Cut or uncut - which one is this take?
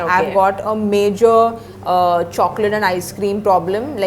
uncut